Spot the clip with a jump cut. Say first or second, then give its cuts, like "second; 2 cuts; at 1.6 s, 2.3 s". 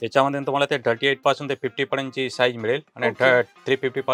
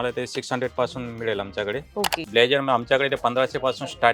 second; 1 cut; at 2.2 s